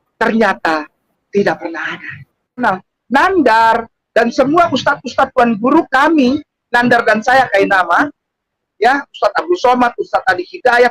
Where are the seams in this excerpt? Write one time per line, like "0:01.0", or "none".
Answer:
0:02.6